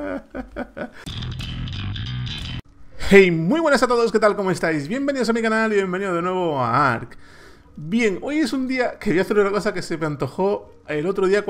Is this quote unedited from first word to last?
no; 1 cut; at 0.9 s

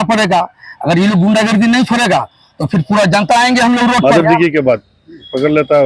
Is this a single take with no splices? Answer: no; 1 cut; at 4.0 s

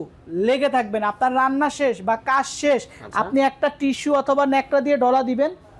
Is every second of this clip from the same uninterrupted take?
yes; 0 cuts

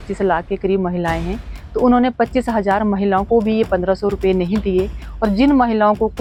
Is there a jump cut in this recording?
no; 0 cuts

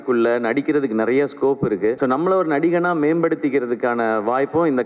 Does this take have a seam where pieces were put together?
yes; 1 cut; at 2.0 s

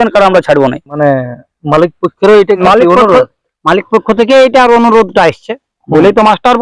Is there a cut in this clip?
yes; 2 cuts; at 1.1 s, 2.6 s

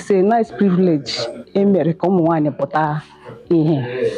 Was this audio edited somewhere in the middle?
no; 0 cuts

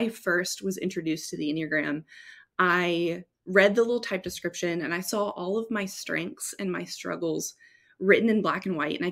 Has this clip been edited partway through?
no; 0 cuts

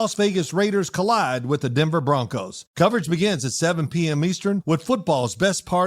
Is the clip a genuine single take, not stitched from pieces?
no; 1 cut; at 2.6 s

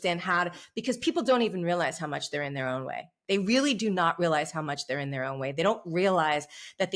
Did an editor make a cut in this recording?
no; 0 cuts

